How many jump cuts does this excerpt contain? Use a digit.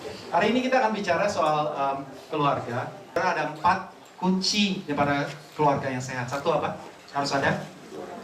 1